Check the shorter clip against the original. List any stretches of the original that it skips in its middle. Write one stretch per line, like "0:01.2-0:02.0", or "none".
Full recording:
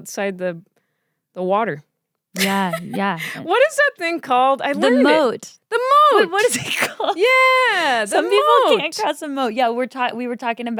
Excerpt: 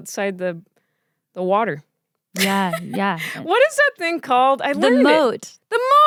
none

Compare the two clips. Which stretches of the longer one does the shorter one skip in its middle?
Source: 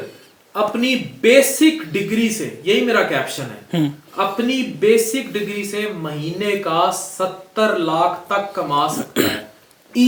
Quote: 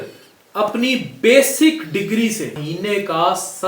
0:02.5-0:06.1

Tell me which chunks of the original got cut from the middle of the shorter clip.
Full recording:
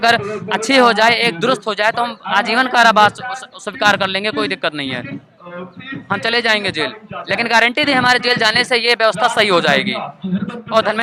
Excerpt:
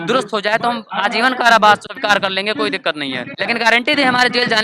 0:03.2-0:03.7
0:05.1-0:07.2

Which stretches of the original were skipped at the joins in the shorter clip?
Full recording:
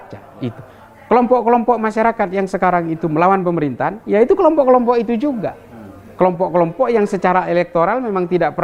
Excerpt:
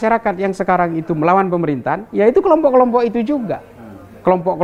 none

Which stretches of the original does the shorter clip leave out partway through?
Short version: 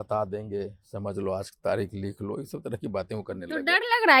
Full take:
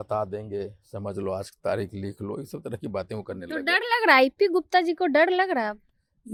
none

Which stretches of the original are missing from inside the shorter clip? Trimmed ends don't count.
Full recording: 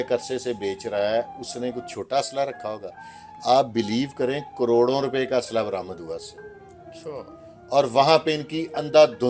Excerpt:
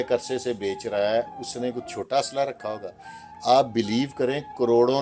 none

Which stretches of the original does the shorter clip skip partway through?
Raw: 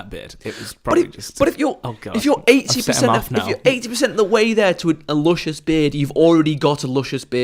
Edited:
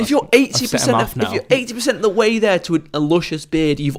none

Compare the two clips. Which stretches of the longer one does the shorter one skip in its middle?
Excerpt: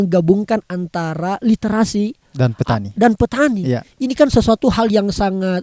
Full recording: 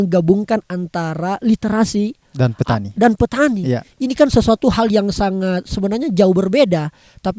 none

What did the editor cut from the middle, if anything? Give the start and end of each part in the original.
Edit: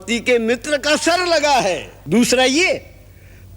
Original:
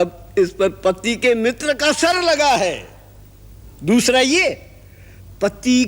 0:02.9-0:03.7

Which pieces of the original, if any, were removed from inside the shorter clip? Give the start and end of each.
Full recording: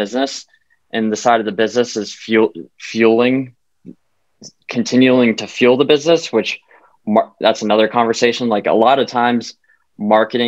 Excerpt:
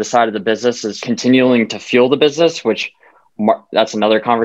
0:02.0-0:04.6

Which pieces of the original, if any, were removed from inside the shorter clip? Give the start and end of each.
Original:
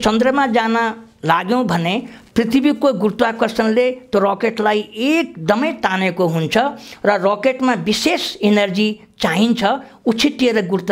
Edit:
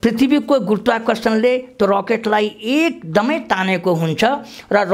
none

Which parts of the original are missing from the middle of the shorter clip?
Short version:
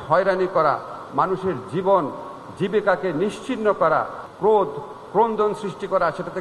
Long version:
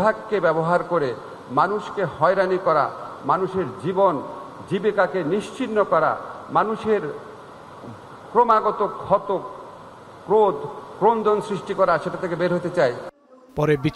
0:06.3-0:10.1

